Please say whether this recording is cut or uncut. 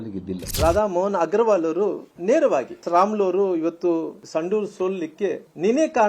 cut